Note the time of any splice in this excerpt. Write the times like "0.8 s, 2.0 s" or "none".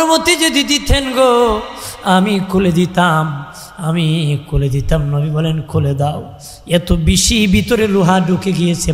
none